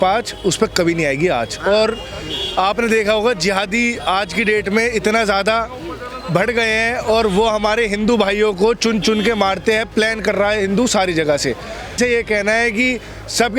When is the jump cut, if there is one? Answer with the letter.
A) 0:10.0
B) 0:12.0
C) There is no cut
B